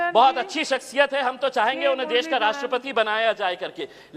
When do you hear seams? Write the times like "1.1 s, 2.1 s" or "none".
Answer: none